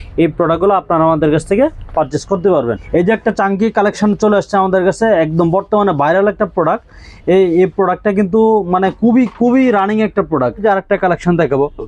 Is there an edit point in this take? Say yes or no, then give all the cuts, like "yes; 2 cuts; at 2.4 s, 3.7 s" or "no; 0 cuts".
yes; 2 cuts; at 2.8 s, 10.6 s